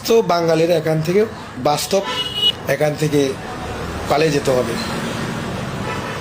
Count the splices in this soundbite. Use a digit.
2